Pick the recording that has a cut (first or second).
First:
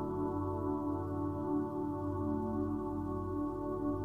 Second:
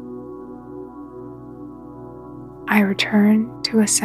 second